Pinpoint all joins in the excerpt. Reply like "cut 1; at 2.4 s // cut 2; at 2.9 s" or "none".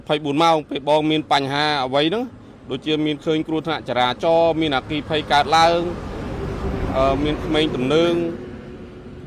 none